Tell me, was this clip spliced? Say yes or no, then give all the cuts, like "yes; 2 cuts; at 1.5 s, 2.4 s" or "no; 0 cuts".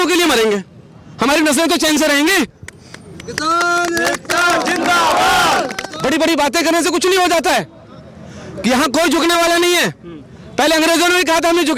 yes; 1 cut; at 5.8 s